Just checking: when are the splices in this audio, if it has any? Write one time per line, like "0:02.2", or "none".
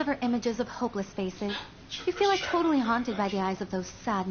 0:03.3